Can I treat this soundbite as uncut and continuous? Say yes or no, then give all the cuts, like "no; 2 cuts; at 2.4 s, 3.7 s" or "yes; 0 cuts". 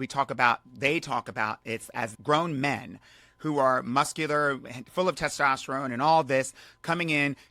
no; 1 cut; at 2.1 s